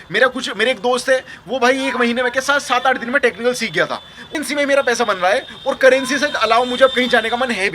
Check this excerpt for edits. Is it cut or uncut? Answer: cut